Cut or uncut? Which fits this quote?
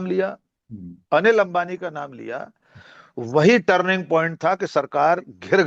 uncut